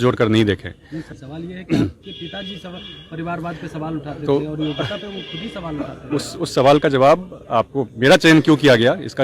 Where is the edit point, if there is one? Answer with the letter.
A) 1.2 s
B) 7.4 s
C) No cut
A